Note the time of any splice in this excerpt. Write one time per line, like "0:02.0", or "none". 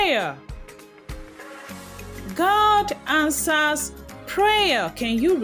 none